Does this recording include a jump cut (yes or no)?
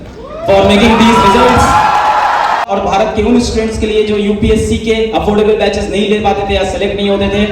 yes